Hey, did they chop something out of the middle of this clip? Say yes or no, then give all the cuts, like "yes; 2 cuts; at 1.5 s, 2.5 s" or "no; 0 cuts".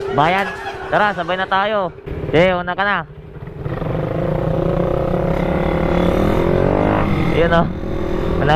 no; 0 cuts